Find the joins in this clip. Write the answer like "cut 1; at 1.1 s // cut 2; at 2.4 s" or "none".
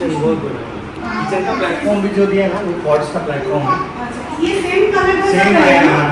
none